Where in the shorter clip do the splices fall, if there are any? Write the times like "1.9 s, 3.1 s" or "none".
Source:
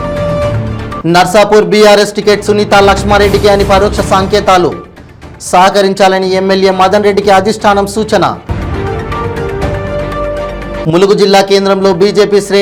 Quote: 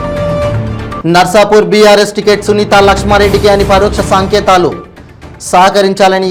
none